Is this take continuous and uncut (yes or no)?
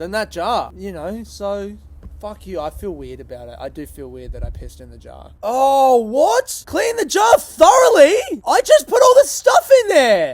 no